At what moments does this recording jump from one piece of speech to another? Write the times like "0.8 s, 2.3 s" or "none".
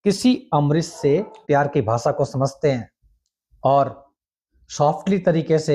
1.4 s